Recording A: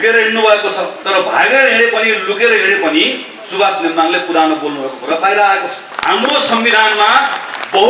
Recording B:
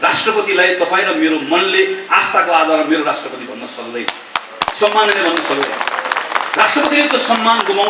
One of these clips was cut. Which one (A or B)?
A